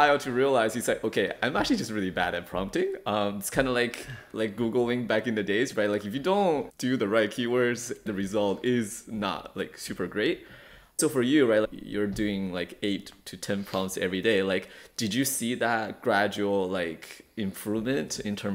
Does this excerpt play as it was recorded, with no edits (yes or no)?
no